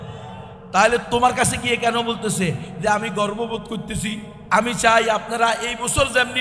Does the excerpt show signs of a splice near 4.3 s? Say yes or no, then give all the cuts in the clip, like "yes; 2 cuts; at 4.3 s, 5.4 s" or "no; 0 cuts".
yes; 1 cut; at 4.3 s